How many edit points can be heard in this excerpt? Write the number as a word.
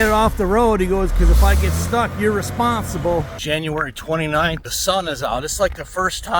two